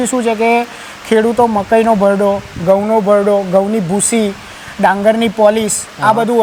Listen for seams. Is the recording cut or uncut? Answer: uncut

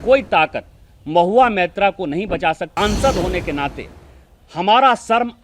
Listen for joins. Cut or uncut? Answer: cut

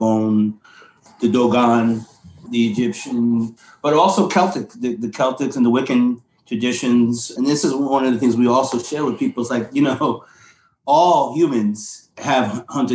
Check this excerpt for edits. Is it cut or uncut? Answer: cut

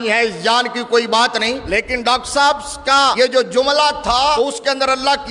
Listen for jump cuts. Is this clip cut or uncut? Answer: cut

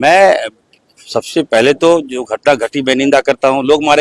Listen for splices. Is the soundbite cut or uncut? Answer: uncut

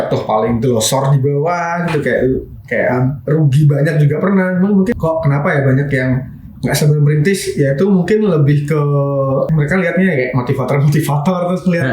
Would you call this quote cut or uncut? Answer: cut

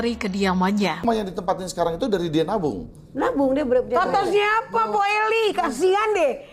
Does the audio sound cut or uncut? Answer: cut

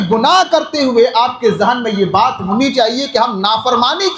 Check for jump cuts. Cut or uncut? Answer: uncut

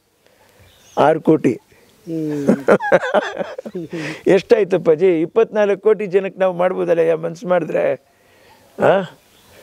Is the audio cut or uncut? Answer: uncut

